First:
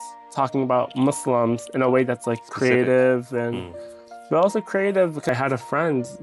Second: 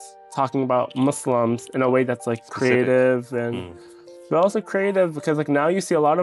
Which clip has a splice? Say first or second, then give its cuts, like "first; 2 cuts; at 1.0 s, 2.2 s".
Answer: first; 1 cut; at 5.3 s